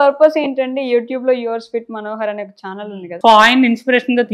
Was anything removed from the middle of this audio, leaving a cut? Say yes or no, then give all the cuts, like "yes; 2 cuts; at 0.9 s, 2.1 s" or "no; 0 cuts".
yes; 1 cut; at 2.7 s